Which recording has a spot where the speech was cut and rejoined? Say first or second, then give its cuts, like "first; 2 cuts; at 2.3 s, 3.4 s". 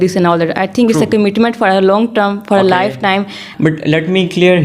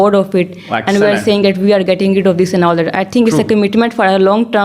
first; 1 cut; at 3.4 s